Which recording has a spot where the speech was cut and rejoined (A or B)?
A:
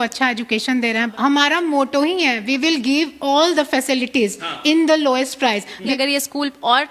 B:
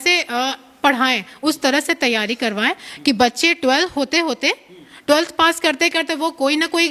A